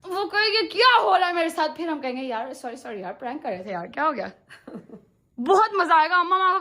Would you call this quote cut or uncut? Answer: uncut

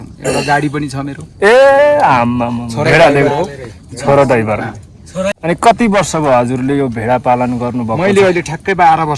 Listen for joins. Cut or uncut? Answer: cut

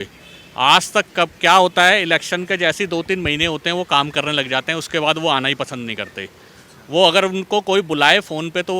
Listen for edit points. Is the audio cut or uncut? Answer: uncut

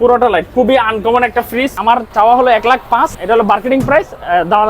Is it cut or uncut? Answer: cut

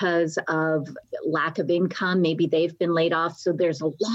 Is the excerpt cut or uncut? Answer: cut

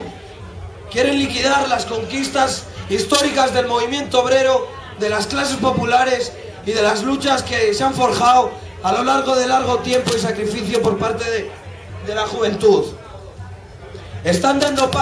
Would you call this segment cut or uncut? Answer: uncut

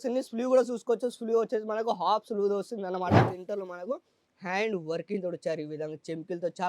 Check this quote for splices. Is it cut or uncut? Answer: cut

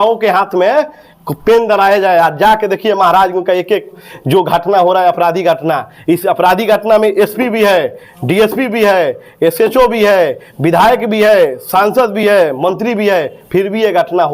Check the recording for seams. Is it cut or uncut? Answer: uncut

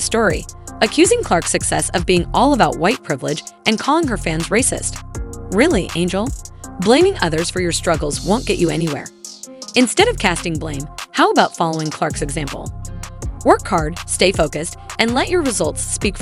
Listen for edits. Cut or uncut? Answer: uncut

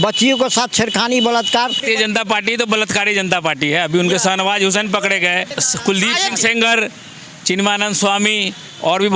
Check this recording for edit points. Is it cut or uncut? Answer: cut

